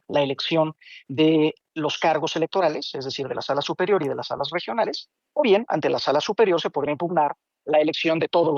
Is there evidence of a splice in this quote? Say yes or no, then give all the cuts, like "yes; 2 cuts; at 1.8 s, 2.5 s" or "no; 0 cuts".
no; 0 cuts